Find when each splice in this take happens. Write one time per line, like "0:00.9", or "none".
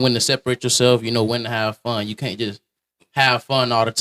none